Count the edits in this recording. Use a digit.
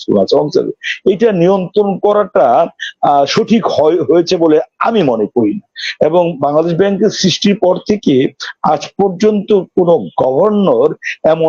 0